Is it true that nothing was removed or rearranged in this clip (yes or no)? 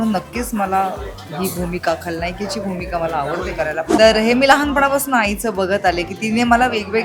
no